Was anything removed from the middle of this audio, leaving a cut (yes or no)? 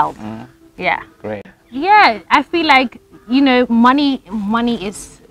yes